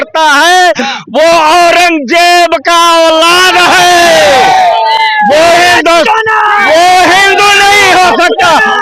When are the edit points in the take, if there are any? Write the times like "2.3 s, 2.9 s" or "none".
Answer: none